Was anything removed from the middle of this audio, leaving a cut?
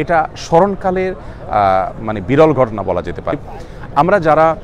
no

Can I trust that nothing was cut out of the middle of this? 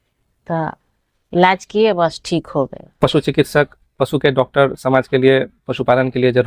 no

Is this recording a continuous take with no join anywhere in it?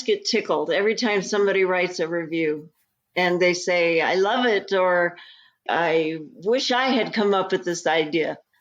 yes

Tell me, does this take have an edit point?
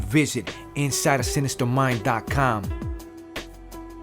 yes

